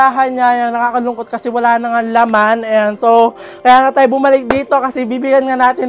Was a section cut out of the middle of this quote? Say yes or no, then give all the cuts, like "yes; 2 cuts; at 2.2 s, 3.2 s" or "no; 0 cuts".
no; 0 cuts